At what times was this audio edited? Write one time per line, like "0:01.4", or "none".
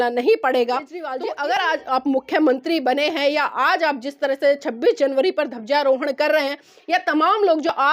0:01.0